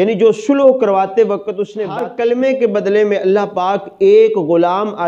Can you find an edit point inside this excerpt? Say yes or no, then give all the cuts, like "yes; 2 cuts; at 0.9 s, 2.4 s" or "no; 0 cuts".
yes; 1 cut; at 1.8 s